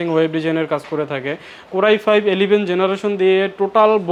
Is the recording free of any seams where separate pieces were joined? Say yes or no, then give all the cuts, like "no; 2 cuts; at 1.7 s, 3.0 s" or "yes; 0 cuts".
yes; 0 cuts